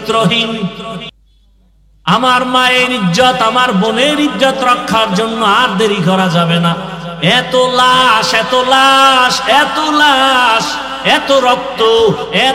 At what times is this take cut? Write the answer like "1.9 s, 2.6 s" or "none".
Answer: 1.2 s